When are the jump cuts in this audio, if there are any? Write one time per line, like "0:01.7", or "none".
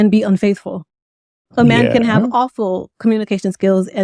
none